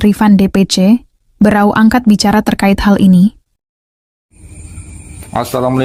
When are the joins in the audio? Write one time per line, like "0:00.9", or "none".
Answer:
none